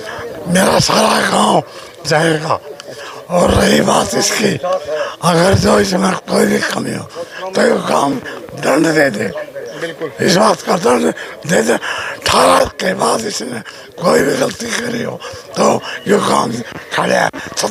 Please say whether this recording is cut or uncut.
uncut